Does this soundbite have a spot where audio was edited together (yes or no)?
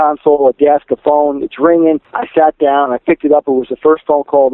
yes